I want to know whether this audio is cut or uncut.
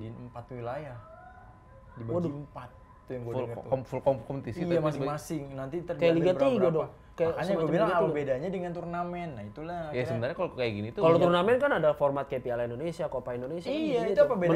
uncut